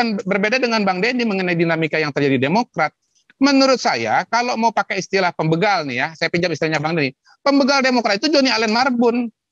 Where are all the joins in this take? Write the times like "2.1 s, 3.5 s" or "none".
none